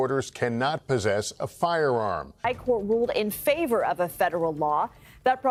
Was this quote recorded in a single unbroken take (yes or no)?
yes